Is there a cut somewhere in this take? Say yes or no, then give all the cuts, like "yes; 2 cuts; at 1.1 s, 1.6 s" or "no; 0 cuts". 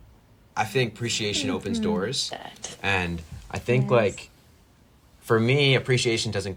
no; 0 cuts